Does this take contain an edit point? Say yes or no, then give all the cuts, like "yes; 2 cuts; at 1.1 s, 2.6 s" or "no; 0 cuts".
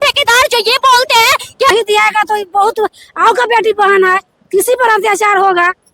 yes; 1 cut; at 1.7 s